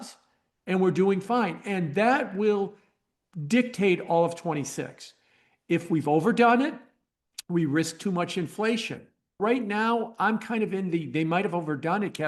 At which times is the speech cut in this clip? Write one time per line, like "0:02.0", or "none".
0:09.4